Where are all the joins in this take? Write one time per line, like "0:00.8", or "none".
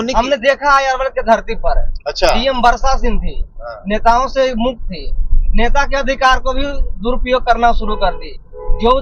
none